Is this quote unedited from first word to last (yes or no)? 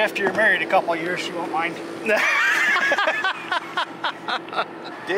yes